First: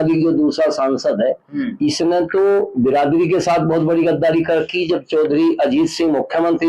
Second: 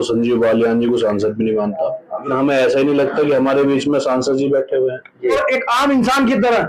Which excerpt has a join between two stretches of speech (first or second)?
second